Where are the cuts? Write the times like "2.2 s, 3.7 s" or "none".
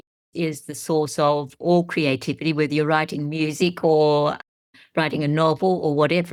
none